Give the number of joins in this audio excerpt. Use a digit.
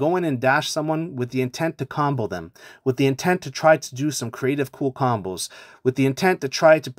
0